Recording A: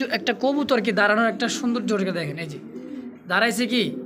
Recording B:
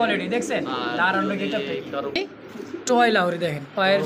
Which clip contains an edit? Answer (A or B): B